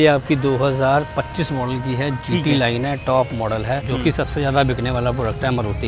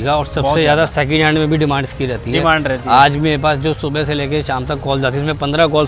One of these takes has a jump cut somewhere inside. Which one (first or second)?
first